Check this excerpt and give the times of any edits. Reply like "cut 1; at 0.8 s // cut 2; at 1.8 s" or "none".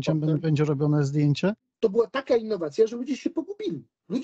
cut 1; at 1.7 s